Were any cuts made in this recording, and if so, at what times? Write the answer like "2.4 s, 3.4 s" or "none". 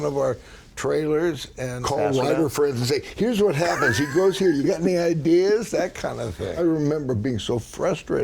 1.8 s, 6.6 s